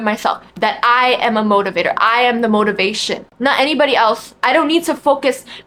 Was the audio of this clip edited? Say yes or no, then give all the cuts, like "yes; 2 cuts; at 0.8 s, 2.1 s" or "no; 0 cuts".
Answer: no; 0 cuts